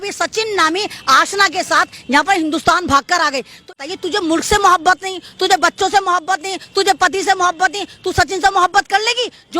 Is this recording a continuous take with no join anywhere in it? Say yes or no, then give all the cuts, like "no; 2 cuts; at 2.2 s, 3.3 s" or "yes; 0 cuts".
no; 1 cut; at 3.8 s